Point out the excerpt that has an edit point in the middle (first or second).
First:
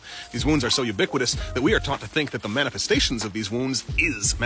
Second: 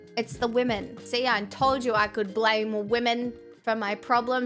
second